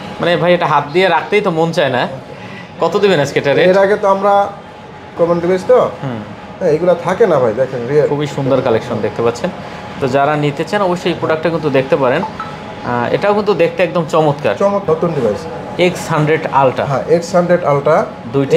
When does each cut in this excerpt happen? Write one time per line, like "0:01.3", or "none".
0:05.1
0:14.8